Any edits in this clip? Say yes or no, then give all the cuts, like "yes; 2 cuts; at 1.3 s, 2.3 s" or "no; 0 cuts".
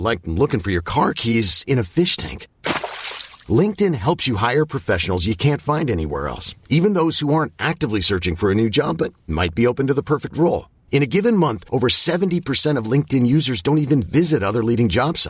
no; 0 cuts